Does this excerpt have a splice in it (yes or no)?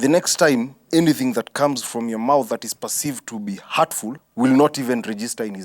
yes